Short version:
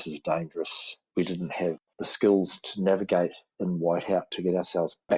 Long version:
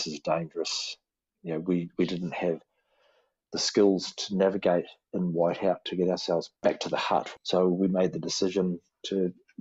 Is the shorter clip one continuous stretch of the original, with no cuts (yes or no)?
no